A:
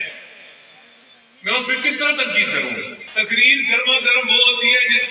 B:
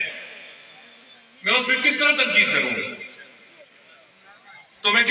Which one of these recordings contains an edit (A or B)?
A